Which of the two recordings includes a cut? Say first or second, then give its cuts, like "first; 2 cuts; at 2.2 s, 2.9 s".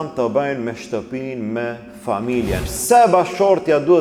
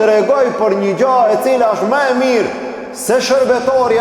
first; 1 cut; at 2.7 s